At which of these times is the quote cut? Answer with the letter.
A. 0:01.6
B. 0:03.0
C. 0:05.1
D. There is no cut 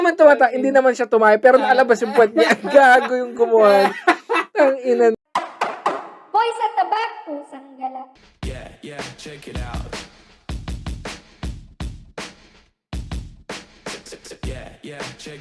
C